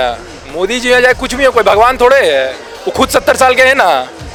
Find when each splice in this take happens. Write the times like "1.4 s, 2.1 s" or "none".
none